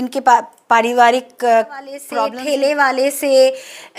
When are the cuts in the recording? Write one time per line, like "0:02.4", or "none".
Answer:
0:02.1